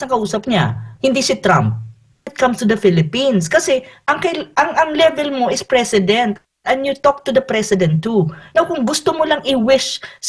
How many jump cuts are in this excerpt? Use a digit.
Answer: 1